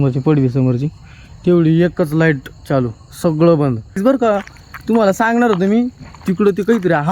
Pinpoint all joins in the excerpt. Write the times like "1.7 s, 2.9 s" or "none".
4.0 s